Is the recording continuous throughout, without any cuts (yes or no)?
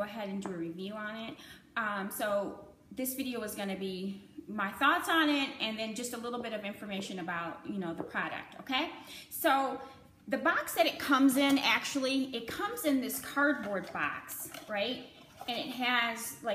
yes